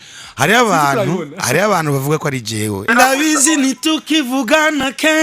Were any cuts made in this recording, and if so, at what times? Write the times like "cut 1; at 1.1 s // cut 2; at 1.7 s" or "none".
cut 1; at 2.9 s